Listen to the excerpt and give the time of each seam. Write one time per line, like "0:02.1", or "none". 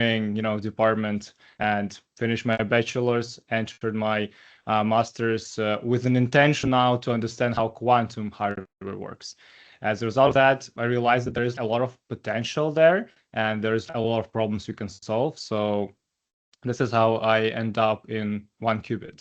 0:11.5
0:13.9